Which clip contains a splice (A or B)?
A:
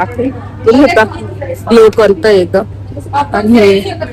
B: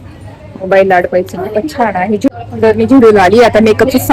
B